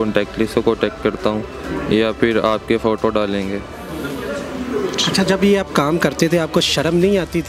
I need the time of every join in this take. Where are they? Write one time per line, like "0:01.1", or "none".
none